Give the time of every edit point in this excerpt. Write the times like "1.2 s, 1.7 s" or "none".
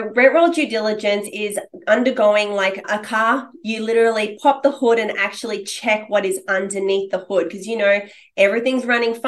2.8 s